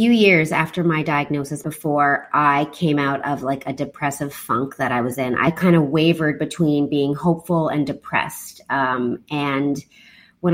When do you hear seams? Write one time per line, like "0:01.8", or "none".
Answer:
0:01.6
0:05.5